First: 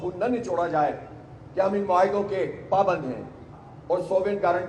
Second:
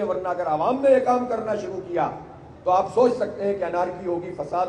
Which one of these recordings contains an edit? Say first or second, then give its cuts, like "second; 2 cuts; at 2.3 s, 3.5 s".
first; 1 cut; at 3.4 s